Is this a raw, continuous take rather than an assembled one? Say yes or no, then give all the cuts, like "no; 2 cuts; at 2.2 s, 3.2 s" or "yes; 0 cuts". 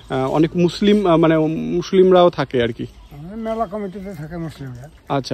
yes; 0 cuts